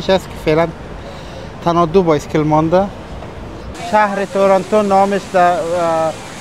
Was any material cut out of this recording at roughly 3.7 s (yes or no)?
yes